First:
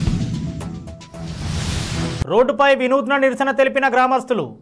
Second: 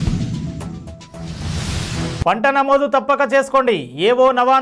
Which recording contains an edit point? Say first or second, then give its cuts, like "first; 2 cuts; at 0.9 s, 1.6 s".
second; 1 cut; at 2.2 s